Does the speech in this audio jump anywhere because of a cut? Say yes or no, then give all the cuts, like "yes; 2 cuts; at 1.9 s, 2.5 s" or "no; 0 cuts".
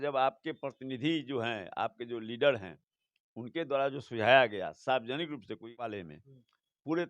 yes; 1 cut; at 5.9 s